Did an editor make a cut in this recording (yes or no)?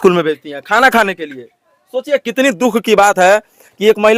no